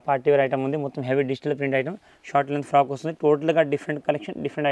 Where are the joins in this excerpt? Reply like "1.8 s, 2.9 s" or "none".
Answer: none